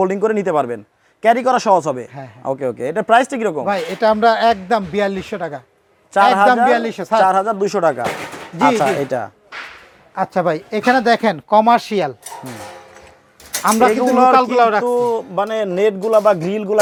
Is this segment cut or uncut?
uncut